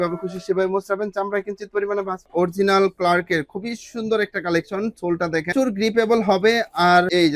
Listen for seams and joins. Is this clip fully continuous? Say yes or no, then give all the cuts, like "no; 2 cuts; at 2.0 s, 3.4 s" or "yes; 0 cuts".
no; 1 cut; at 2.3 s